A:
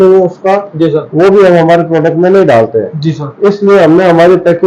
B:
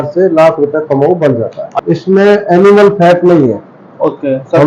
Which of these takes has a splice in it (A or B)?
B